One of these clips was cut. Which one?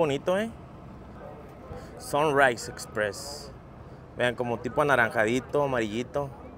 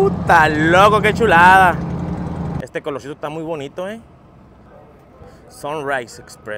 second; 1 cut; at 2.6 s

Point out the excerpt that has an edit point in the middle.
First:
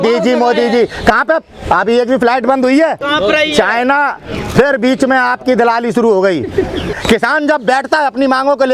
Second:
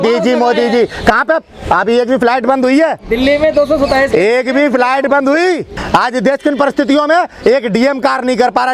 first; 2 cuts; at 3.0 s, 6.9 s

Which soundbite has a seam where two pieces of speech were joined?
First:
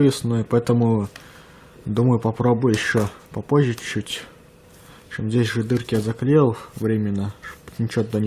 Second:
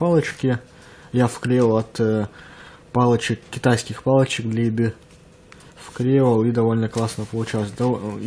first; 1 cut; at 2.3 s

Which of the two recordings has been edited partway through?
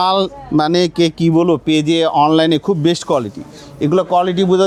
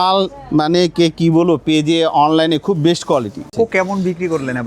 second; 1 cut; at 3.5 s

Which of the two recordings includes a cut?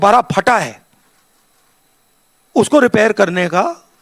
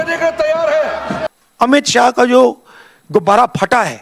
second; 1 cut; at 1.2 s

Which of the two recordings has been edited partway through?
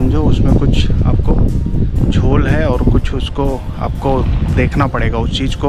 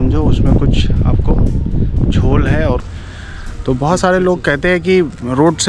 second; 1 cut; at 2.8 s

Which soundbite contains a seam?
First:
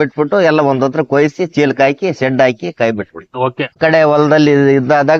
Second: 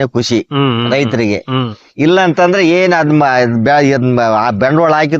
first; 1 cut; at 3.7 s

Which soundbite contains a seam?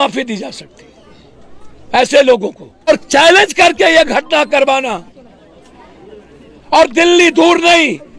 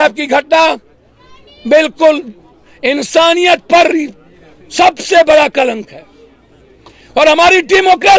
first; 1 cut; at 2.9 s

